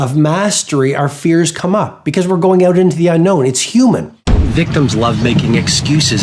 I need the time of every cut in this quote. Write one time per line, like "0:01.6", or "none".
0:04.5

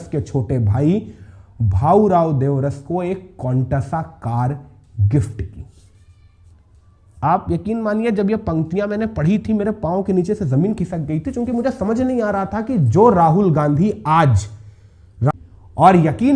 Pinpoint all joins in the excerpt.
0:15.3

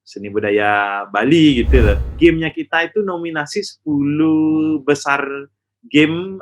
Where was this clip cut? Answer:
0:02.1

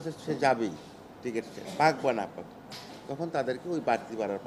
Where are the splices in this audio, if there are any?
none

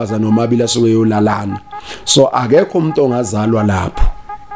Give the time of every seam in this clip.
none

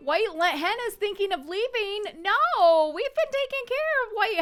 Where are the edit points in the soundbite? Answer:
none

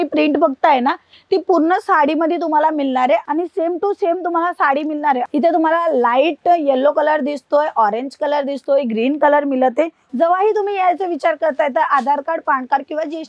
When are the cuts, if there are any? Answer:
0:03.3
0:05.2
0:10.0

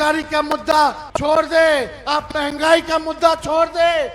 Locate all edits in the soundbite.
0:01.1

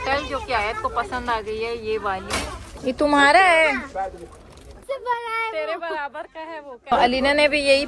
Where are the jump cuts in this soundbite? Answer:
0:02.7
0:04.8
0:06.9

